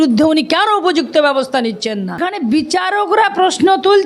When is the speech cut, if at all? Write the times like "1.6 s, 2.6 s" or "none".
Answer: 2.2 s